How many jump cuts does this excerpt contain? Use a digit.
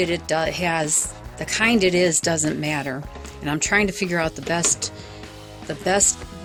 0